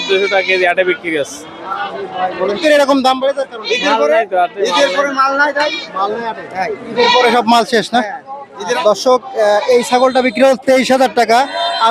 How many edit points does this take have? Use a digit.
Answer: 2